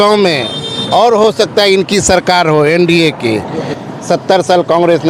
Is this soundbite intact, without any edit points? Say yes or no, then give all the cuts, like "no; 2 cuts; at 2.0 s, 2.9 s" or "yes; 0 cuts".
no; 1 cut; at 3.7 s